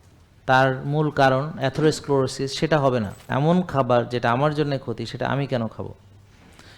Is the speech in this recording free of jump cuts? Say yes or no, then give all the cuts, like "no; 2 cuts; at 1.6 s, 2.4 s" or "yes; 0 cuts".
no; 1 cut; at 3.2 s